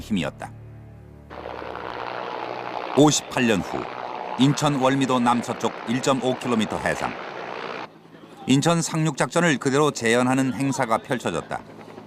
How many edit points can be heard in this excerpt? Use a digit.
1